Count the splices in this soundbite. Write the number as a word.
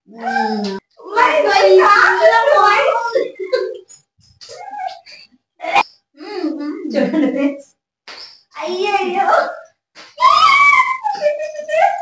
two